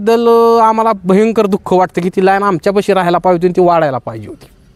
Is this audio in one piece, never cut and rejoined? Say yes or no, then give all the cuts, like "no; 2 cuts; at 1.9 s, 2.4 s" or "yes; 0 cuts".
yes; 0 cuts